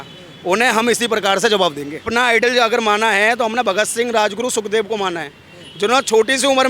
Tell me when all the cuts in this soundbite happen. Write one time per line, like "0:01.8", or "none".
0:02.1